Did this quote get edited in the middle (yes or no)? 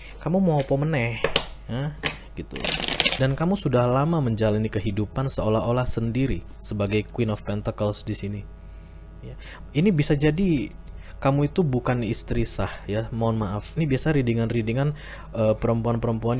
yes